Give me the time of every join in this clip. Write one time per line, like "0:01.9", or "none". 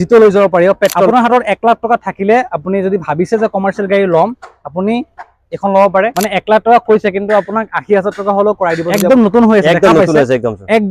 0:01.1
0:06.2
0:08.9